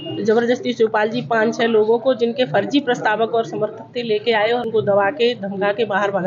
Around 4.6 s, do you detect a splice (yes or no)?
yes